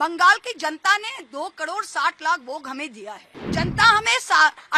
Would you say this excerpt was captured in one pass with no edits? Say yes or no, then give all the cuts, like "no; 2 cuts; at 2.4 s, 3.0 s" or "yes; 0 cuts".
no; 1 cut; at 3.5 s